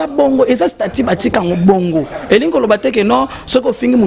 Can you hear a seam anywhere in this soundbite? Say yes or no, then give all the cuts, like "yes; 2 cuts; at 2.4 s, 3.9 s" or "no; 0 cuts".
no; 0 cuts